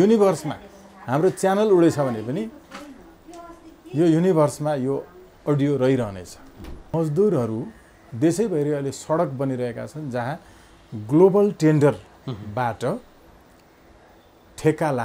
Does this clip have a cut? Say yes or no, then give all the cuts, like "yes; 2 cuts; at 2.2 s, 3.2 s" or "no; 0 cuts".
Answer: yes; 1 cut; at 6.9 s